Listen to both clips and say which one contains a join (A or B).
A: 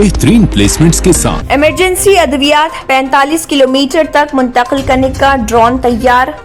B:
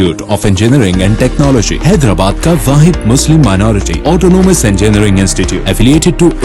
A